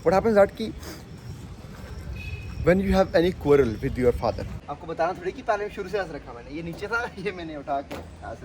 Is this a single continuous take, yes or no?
no